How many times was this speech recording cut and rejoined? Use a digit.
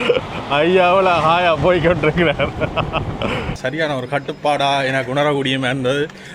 1